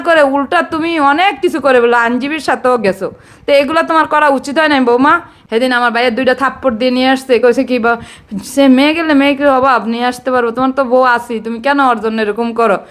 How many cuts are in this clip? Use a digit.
1